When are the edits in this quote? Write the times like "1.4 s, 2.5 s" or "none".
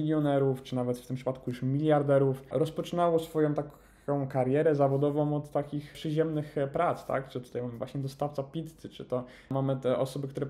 9.5 s